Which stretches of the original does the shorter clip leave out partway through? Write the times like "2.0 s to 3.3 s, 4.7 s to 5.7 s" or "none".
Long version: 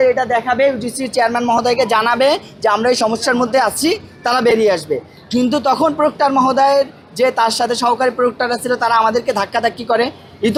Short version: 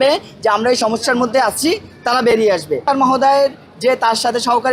5.0 s to 6.2 s